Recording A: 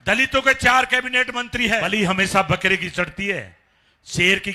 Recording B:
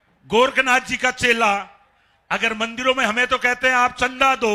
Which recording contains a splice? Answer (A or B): A